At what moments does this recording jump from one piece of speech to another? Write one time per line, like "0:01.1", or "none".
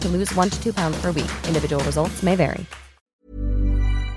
0:03.2